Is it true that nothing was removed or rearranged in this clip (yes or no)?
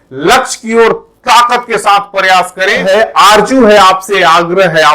no